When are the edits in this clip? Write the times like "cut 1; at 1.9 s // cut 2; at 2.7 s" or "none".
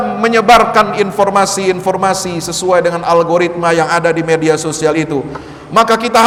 none

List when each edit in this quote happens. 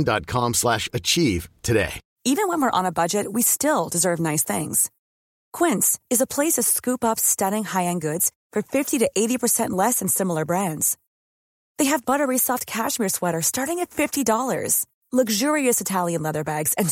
cut 1; at 2.0 s

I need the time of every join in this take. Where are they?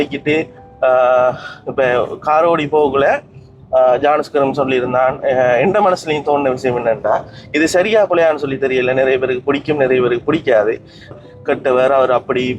cut 1; at 11.1 s

